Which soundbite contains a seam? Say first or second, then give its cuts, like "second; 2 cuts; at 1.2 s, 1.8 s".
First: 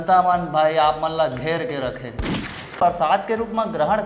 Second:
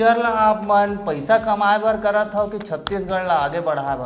first; 1 cut; at 2.8 s